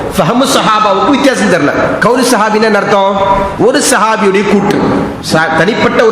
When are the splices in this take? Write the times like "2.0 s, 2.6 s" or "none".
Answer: 2.0 s, 3.5 s, 5.2 s